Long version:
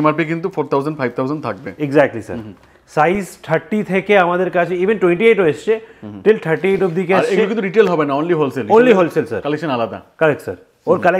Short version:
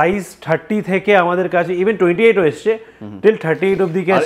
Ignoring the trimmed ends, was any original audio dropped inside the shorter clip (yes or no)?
no